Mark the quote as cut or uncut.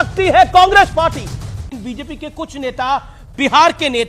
cut